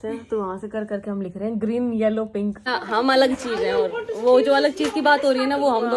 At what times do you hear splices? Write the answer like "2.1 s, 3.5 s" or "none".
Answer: 2.7 s